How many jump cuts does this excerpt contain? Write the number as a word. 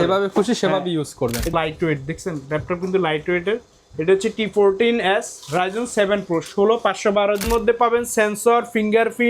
two